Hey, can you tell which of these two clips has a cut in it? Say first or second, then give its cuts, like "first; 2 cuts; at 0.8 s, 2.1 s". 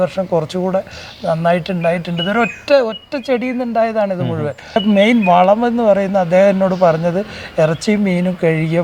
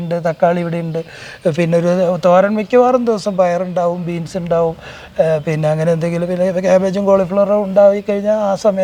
first; 1 cut; at 4.8 s